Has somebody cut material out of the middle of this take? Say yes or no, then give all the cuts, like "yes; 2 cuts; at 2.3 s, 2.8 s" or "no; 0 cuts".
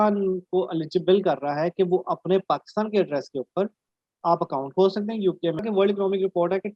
yes; 1 cut; at 5.6 s